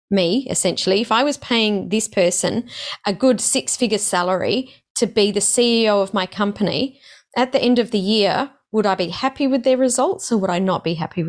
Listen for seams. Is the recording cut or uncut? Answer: uncut